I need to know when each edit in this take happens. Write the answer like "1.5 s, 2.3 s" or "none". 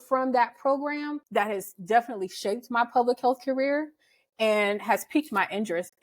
1.2 s